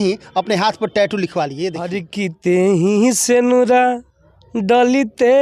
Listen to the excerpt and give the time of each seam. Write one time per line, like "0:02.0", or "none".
0:02.0